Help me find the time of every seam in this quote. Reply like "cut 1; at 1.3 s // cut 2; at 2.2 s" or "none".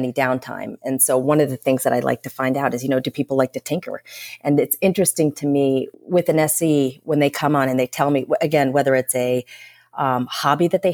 cut 1; at 6.0 s

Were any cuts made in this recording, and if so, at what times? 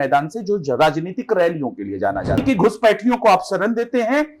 cut 1; at 2.4 s

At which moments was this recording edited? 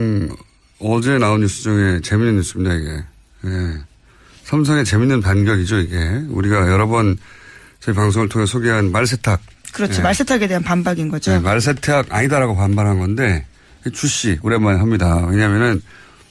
none

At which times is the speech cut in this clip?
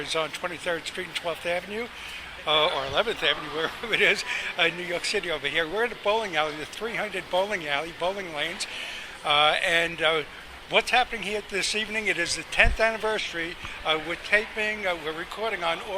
cut 1; at 10.7 s

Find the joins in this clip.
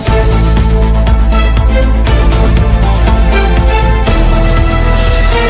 none

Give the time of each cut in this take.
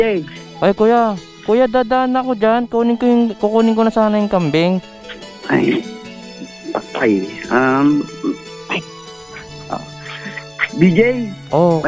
none

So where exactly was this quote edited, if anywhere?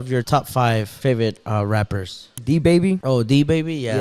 cut 1; at 2.3 s

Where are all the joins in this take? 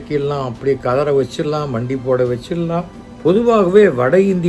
cut 1; at 3.0 s

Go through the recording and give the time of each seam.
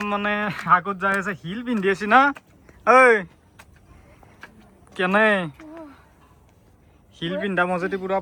none

